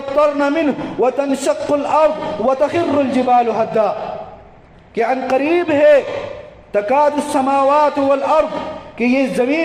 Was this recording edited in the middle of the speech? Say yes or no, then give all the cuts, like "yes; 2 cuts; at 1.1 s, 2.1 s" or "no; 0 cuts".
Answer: no; 0 cuts